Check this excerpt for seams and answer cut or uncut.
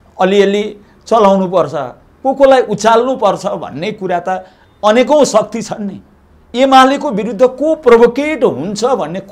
uncut